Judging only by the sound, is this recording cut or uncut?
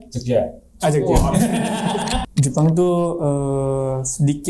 cut